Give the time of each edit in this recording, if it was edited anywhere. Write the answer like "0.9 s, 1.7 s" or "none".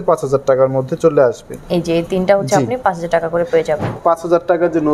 1.5 s, 4.0 s